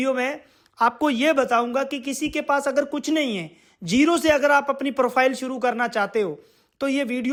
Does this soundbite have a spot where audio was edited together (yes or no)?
no